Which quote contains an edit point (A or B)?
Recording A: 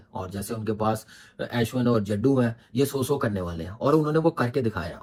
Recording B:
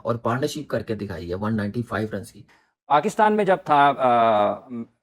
B